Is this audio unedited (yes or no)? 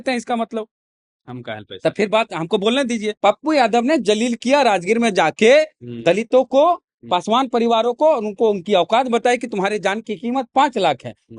no